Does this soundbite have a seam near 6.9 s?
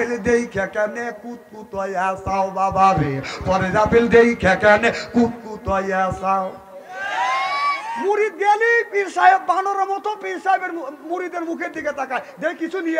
no; 0 cuts

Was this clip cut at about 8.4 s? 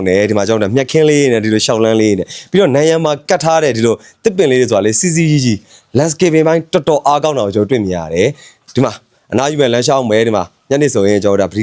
no; 0 cuts

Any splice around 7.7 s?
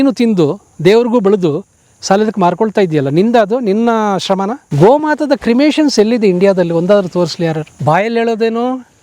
yes; 2 cuts; at 4.6 s, 7.7 s

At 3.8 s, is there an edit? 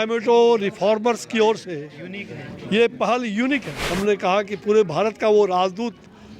yes; 1 cut; at 3.8 s

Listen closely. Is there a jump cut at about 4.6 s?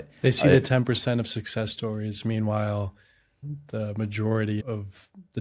yes; 2 cuts; at 3.4 s, 4.6 s

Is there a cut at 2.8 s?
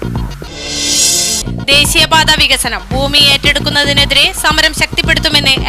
no; 1 cut; at 1.2 s

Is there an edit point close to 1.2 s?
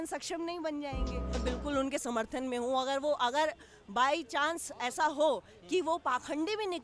yes; 1 cut; at 1.2 s

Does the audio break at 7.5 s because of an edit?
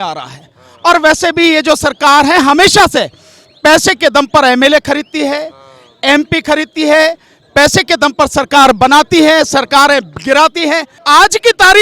no; 1 cut; at 10.9 s

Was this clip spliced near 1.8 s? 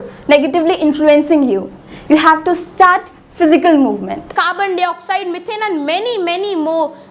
no; 1 cut; at 4.4 s

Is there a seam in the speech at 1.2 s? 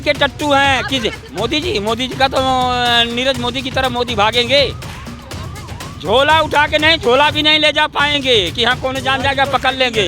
yes; 1 cut; at 1.2 s

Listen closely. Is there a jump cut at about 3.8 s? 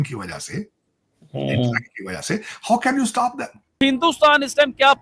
yes; 1 cut; at 3.8 s

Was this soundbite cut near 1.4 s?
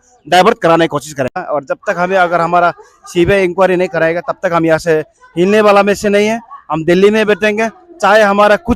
yes; 1 cut; at 1.4 s

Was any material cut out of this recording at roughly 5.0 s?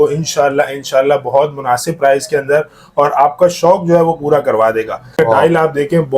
yes; 1 cut; at 5.0 s

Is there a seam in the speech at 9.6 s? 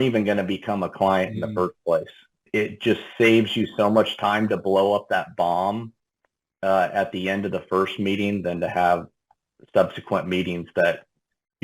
no; 1 cut; at 2.4 s

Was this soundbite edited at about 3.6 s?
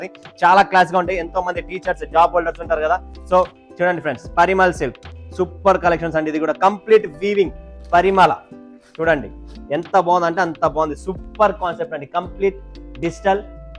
yes; 1 cut; at 3.6 s

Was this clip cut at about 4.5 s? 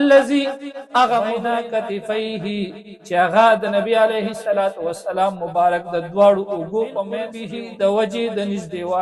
no; 2 cuts; at 1.4 s, 7.4 s

